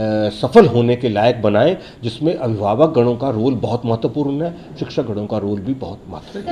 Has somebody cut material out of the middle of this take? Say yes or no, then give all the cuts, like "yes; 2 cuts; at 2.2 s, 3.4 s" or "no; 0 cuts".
no; 0 cuts